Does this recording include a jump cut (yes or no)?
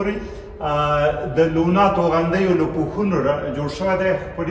no